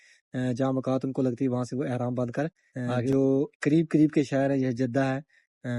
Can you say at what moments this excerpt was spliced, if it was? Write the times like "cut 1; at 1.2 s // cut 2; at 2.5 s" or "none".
cut 1; at 3.1 s